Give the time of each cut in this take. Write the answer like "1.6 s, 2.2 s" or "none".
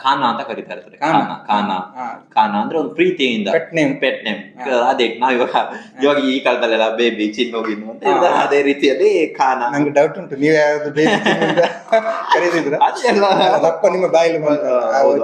none